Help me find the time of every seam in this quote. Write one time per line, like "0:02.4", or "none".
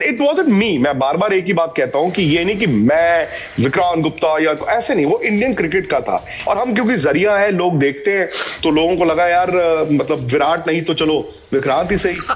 none